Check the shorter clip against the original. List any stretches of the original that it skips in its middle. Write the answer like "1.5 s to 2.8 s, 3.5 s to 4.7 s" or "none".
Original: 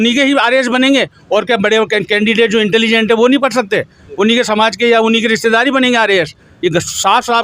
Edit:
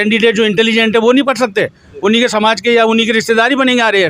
none